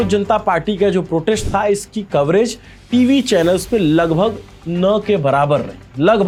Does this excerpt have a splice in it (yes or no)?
no